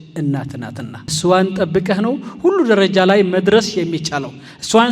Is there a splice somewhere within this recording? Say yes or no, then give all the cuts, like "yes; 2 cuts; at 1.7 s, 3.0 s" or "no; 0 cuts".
yes; 1 cut; at 1.1 s